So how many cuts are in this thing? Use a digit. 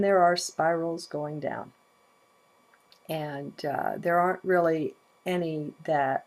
1